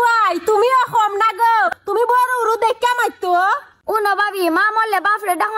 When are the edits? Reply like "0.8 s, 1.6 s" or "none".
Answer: 1.8 s, 3.7 s